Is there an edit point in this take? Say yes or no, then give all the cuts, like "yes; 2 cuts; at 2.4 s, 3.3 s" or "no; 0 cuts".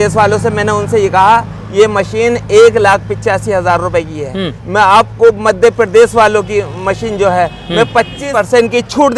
yes; 1 cut; at 8.2 s